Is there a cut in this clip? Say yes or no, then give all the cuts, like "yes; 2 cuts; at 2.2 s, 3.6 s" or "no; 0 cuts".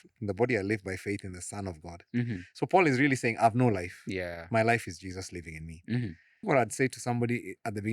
yes; 1 cut; at 6.4 s